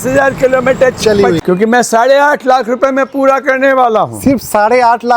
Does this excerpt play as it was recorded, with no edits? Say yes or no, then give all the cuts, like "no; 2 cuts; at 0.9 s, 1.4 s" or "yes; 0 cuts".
no; 1 cut; at 1.4 s